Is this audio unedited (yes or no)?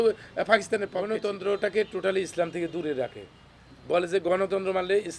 no